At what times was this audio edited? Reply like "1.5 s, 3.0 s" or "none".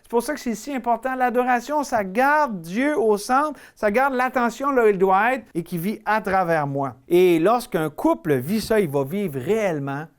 5.5 s, 7.0 s